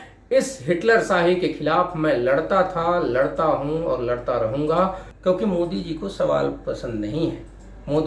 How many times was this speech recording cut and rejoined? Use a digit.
1